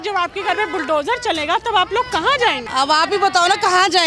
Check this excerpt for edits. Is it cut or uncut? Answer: cut